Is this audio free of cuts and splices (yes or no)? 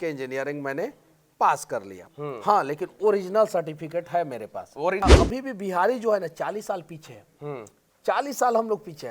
no